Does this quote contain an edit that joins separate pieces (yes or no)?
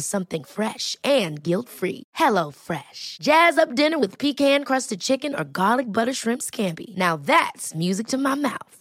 no